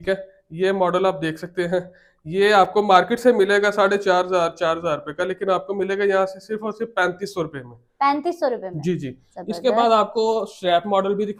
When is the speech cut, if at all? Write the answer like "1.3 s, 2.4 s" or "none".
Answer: none